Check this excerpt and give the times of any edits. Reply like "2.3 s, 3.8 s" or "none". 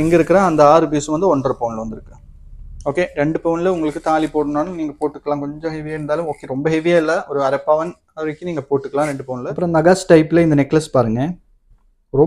9.4 s